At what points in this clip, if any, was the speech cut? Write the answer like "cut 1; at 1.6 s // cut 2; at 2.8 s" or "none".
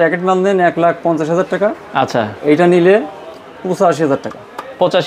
none